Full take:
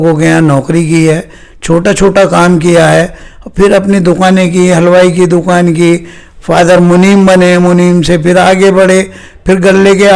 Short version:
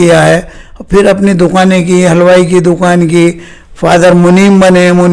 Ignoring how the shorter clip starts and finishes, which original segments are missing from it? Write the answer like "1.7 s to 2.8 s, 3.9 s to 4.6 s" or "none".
none